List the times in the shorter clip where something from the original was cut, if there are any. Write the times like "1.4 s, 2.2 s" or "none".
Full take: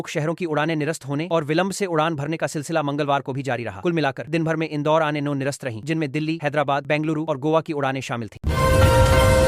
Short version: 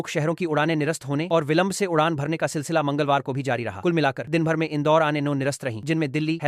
none